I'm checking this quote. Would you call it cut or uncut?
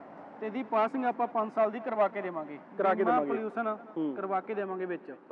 uncut